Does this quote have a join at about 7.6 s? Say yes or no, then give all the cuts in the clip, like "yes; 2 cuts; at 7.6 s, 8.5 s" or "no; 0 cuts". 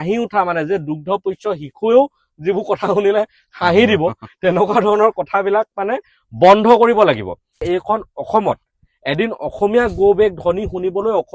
yes; 1 cut; at 7.6 s